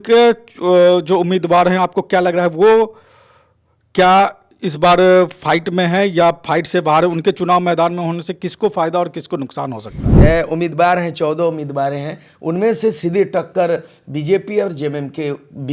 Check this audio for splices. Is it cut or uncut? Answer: cut